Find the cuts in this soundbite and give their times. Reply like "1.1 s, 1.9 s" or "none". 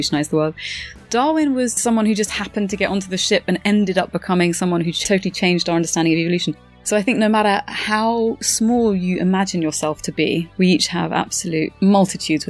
10.5 s, 11.7 s